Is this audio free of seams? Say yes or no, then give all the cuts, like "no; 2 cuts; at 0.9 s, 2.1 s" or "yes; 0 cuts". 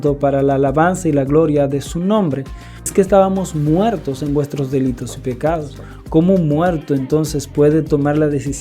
no; 1 cut; at 2.9 s